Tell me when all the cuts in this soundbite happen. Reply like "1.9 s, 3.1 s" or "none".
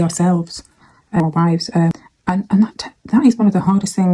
1.2 s, 1.9 s